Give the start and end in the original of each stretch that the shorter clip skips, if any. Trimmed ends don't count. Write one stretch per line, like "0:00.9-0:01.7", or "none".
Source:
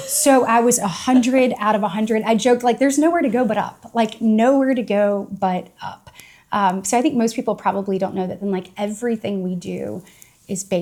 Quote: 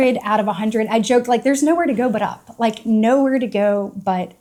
none